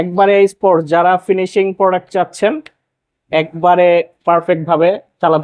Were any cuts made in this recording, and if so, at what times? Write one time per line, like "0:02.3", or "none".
none

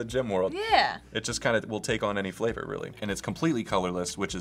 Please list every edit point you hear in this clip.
0:03.0

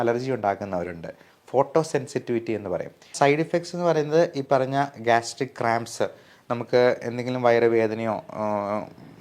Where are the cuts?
0:03.1

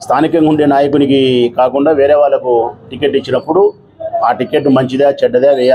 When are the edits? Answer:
none

